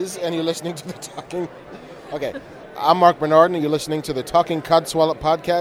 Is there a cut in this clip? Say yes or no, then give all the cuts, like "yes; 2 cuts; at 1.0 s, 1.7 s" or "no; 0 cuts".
no; 0 cuts